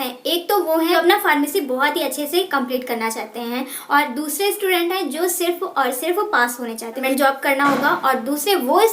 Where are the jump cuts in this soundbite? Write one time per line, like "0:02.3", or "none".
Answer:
0:00.9
0:07.0